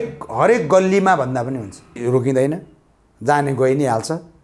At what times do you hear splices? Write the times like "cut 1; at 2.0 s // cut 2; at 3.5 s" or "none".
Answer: cut 1; at 2.0 s